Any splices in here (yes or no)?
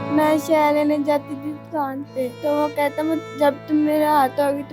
yes